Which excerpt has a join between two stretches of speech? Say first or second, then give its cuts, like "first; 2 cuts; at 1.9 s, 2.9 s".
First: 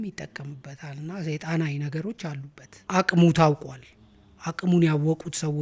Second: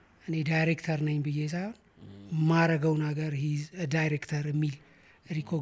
first; 1 cut; at 2.8 s